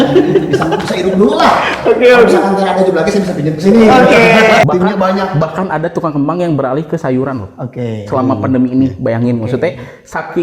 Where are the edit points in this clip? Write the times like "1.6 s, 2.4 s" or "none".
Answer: 4.7 s